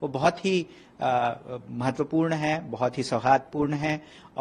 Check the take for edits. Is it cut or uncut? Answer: uncut